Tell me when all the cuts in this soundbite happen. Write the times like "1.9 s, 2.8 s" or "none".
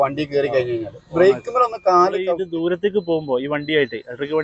2.4 s